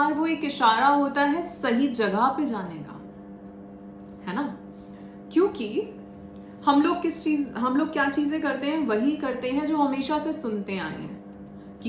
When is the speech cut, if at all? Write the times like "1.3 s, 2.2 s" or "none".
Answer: none